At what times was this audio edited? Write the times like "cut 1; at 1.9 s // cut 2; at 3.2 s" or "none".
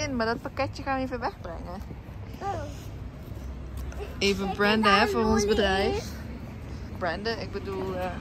none

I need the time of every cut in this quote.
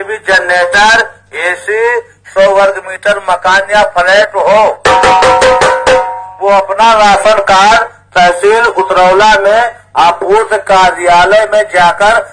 none

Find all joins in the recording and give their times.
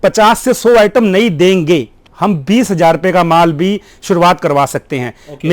cut 1; at 2.0 s

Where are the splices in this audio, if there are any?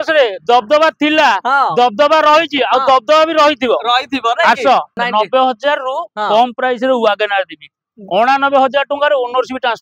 cut 1; at 5.0 s

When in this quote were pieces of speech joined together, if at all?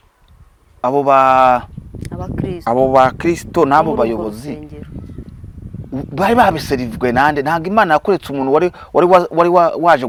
none

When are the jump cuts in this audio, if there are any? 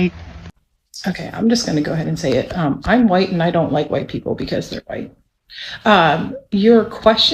none

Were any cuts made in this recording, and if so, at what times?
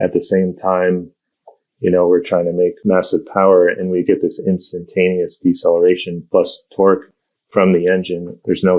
cut 1; at 2.8 s // cut 2; at 6.1 s

